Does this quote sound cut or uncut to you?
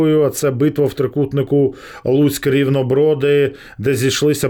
uncut